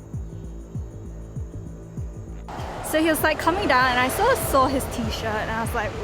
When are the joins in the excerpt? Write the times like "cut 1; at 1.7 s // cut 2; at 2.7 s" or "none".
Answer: cut 1; at 2.4 s